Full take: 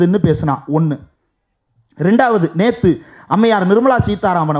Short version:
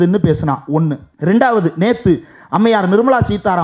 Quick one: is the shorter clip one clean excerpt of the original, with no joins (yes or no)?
no